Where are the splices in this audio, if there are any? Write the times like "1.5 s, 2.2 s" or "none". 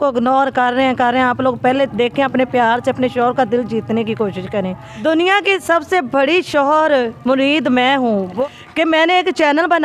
4.8 s, 8.4 s